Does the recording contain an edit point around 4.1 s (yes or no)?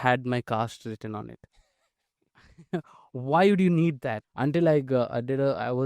yes